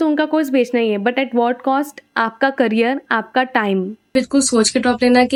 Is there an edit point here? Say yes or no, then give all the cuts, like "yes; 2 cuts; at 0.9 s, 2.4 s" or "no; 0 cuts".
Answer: no; 0 cuts